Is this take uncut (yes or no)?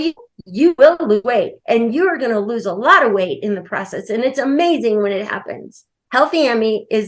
yes